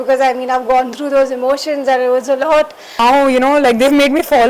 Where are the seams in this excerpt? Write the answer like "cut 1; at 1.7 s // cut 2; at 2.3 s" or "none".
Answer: cut 1; at 3.0 s